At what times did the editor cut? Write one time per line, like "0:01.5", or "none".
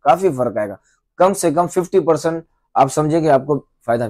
none